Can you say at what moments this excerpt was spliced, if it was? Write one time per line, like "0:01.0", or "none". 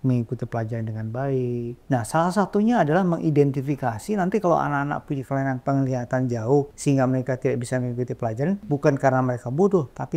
0:01.8
0:06.7
0:08.6